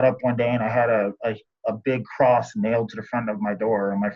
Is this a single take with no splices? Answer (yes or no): yes